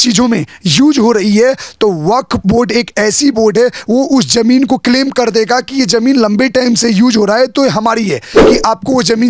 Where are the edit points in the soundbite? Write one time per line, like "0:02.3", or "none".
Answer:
0:08.4